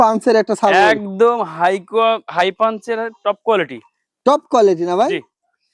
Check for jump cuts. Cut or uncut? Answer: uncut